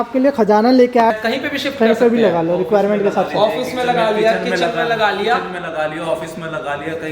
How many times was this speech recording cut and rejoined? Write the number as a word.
one